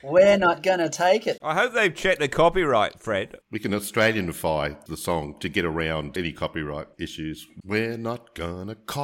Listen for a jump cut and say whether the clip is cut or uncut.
cut